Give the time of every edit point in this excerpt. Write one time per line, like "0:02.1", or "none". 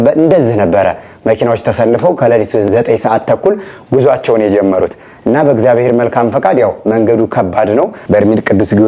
0:08.0